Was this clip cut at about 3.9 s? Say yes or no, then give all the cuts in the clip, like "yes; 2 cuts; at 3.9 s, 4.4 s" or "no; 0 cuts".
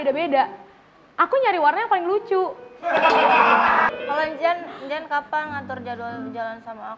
yes; 1 cut; at 3.9 s